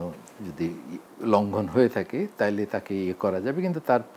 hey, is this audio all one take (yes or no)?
no